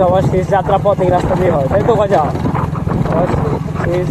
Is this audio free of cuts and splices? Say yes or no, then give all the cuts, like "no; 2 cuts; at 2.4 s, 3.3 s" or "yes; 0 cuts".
yes; 0 cuts